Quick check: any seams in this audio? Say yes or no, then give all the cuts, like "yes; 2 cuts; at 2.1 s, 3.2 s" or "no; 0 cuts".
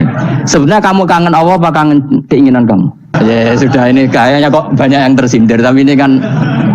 yes; 1 cut; at 3.1 s